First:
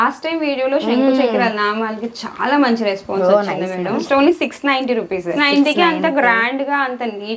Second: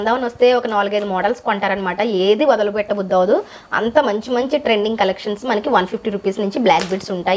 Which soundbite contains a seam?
first; 2 cuts; at 4.0 s, 5.4 s

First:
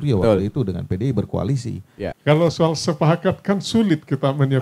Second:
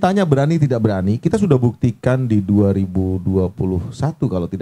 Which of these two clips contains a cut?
first; 1 cut; at 2.2 s

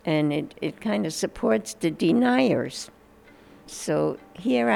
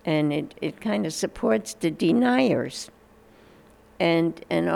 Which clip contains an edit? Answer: first; 1 cut; at 3.7 s

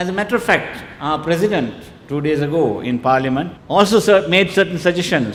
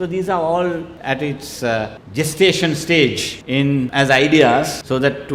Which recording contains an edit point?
second; 1 cut; at 3.6 s

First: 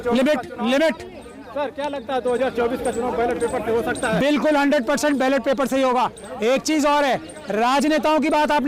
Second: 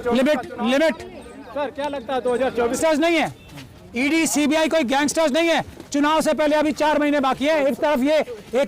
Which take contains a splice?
second; 1 cut; at 2.8 s

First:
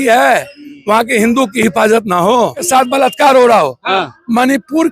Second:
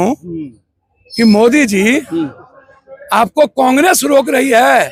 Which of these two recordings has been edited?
first; 1 cut; at 2.6 s

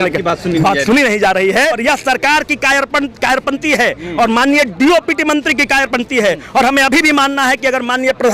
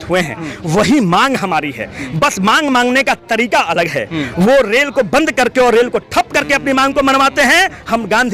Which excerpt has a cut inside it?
first; 1 cut; at 1.8 s

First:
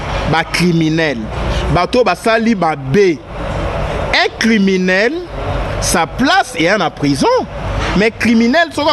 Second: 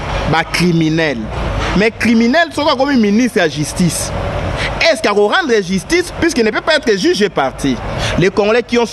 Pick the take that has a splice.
second; 2 cuts; at 1.4 s, 7.9 s

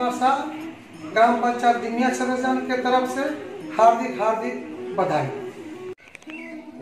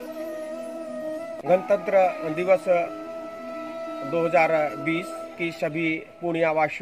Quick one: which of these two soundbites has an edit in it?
second; 1 cut; at 1.4 s

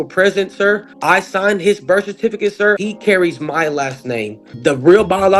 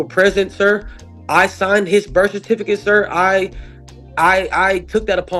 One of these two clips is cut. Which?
first; 3 cuts; at 0.9 s, 2.8 s, 4.5 s

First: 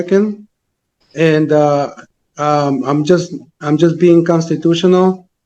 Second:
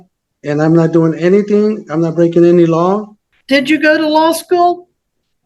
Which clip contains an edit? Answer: second; 1 cut; at 3.2 s

